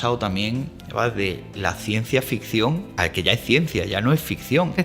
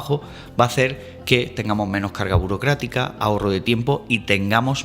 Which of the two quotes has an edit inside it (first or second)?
first